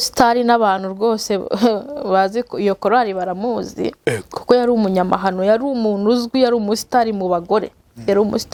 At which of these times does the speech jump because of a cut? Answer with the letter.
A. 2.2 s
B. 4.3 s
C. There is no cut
C